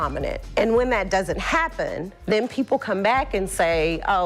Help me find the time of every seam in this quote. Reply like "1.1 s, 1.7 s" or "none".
none